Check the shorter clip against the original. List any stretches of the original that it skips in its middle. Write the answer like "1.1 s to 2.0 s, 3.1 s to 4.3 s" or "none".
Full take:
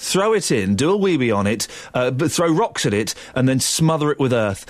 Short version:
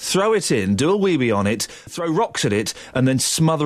1.9 s to 2.3 s